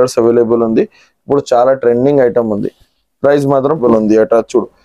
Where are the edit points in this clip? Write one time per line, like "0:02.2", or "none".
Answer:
0:03.8